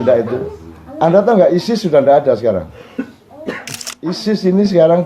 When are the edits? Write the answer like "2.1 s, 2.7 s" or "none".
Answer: 4.2 s